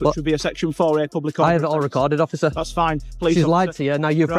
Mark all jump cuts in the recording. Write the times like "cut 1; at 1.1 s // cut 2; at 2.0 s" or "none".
cut 1; at 3.1 s